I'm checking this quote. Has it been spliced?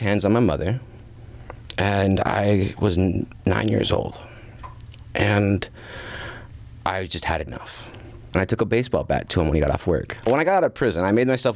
yes; 2 cuts; at 8.2 s, 10.3 s

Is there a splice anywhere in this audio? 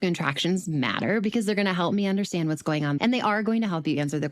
yes; 1 cut; at 3.0 s

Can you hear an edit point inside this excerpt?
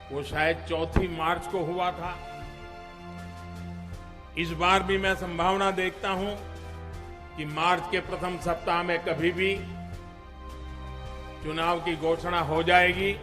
yes; 2 cuts; at 9.6 s, 11.4 s

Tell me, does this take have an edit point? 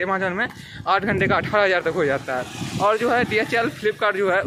no; 0 cuts

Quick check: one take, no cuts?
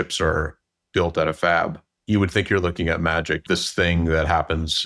no; 2 cuts; at 1.9 s, 3.4 s

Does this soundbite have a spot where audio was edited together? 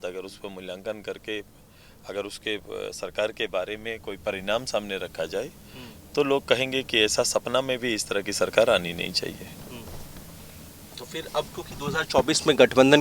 no; 0 cuts

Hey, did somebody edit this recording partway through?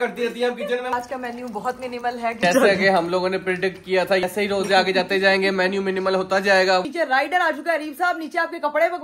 yes; 4 cuts; at 0.9 s, 2.4 s, 4.2 s, 6.8 s

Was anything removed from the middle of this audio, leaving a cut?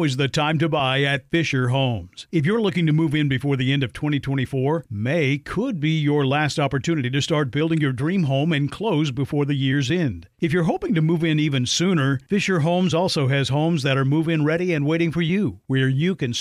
no; 0 cuts

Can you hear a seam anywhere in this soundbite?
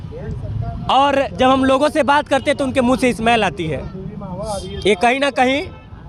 no; 0 cuts

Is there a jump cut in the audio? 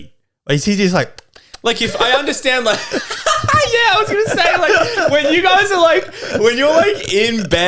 no; 0 cuts

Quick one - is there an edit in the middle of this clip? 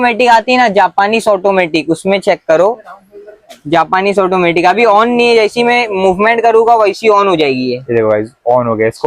no; 0 cuts

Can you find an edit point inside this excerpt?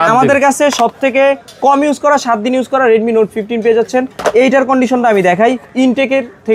no; 0 cuts

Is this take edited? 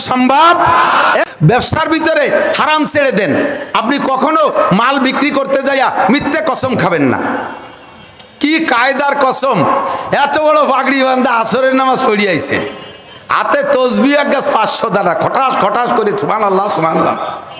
yes; 1 cut; at 1.2 s

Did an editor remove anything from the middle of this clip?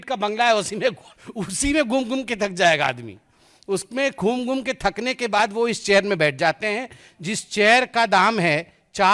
no; 0 cuts

